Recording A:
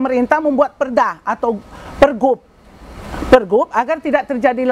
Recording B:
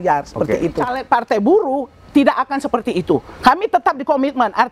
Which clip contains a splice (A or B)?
B